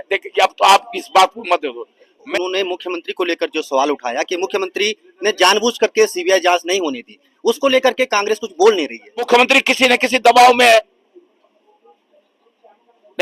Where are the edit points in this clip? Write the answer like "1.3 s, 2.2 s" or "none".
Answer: 2.3 s, 9.3 s